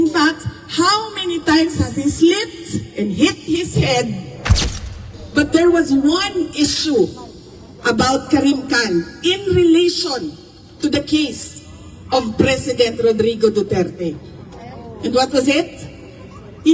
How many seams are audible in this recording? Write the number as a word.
one